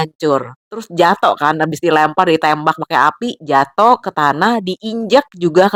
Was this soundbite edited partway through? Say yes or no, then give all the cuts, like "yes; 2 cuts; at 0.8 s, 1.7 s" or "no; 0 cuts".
no; 0 cuts